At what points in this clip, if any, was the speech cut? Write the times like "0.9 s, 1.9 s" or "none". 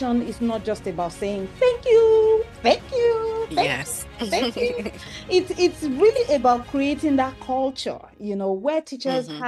none